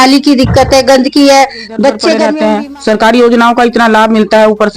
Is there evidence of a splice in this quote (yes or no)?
yes